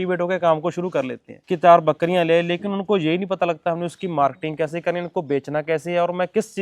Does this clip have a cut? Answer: no; 0 cuts

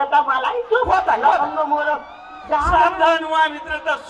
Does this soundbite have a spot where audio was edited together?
yes; 1 cut; at 2.7 s

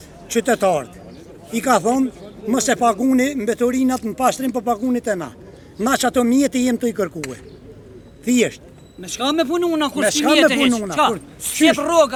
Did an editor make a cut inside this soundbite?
no; 0 cuts

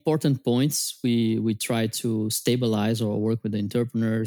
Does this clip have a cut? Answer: no; 0 cuts

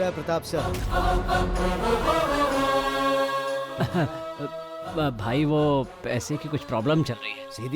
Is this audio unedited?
no; 1 cut; at 3.7 s

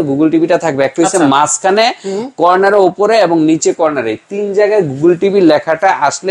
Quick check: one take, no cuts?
yes; 0 cuts

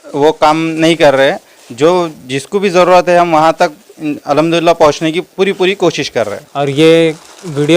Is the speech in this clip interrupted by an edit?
yes; 1 cut; at 6.4 s

